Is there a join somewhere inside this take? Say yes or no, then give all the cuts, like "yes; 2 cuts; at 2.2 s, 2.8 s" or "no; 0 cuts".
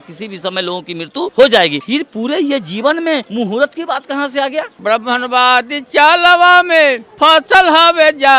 yes; 5 cuts; at 1.3 s, 1.8 s, 3.3 s, 4.7 s, 7.1 s